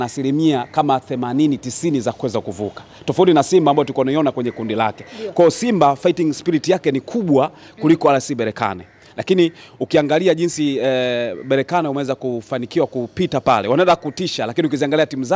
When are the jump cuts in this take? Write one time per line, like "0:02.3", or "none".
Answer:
none